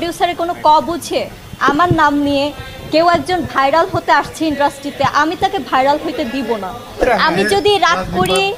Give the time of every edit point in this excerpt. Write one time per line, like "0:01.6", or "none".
0:01.5
0:07.0